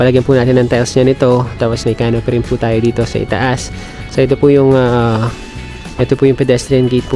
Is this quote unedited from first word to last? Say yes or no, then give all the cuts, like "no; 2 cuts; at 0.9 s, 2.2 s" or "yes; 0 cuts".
yes; 0 cuts